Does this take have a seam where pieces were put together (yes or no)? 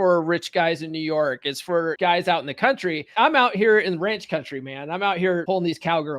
yes